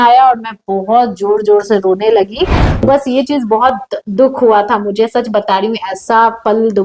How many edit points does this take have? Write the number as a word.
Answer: one